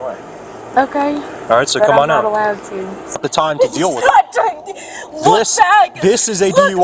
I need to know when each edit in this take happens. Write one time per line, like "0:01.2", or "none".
0:03.2